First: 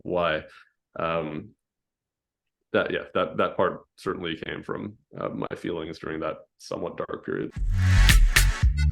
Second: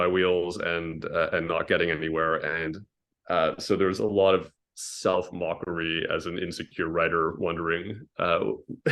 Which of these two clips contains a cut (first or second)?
first